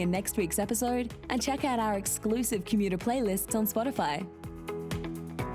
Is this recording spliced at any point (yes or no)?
yes